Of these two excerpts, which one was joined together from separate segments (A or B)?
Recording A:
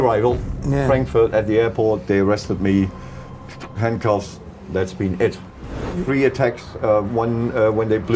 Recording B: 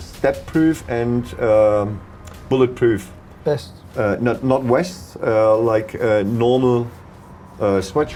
A